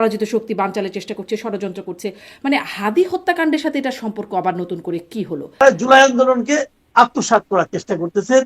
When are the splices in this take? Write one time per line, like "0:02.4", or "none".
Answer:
0:05.6